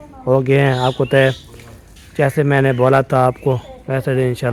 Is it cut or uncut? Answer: uncut